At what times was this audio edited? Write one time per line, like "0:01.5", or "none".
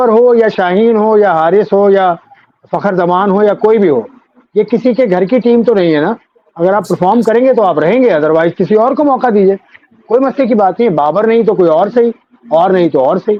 none

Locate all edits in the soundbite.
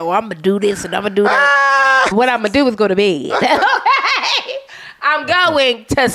0:02.1

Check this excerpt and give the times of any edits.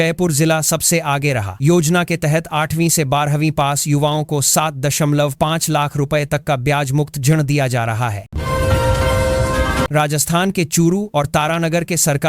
0:01.6
0:08.2
0:09.9

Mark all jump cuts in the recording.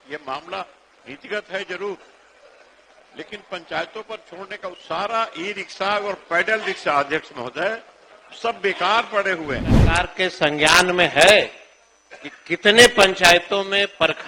0:09.9

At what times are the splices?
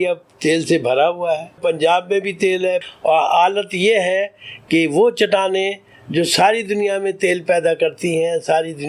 0:01.6
0:02.8

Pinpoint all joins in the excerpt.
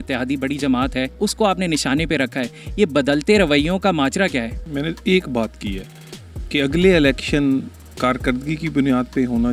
0:01.1
0:04.6

